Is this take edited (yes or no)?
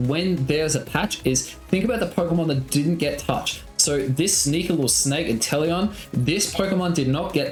no